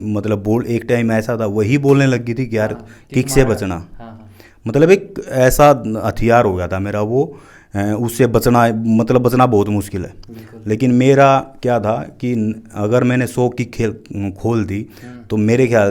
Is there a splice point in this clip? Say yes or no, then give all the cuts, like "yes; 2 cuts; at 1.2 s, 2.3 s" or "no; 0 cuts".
no; 0 cuts